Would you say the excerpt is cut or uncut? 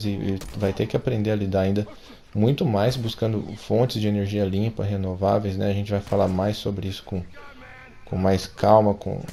uncut